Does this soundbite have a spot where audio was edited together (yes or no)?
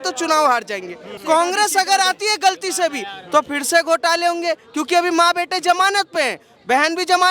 yes